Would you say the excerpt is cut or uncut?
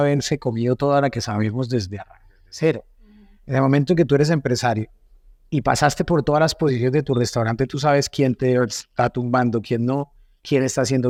uncut